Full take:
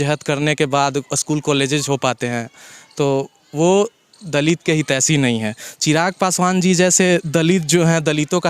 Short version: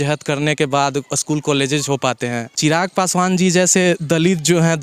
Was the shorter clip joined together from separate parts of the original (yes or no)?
yes